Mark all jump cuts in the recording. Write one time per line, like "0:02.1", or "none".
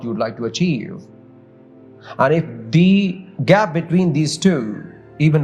none